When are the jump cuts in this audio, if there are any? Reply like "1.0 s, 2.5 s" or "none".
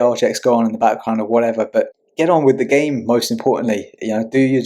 2.0 s